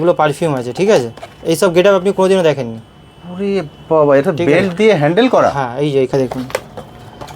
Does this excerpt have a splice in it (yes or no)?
yes